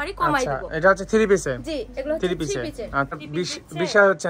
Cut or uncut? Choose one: cut